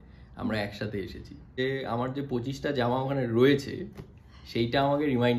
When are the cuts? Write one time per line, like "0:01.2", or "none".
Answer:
0:01.6